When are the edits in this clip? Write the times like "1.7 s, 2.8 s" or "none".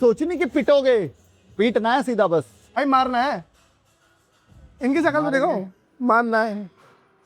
2.6 s